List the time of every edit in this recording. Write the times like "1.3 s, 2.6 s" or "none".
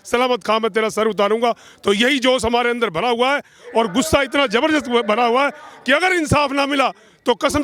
none